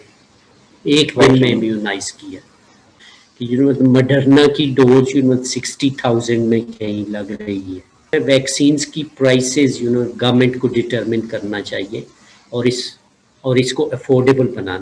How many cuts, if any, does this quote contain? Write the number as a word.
two